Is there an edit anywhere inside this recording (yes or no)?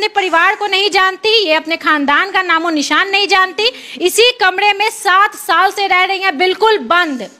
no